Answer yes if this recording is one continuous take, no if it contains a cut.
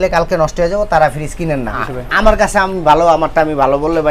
no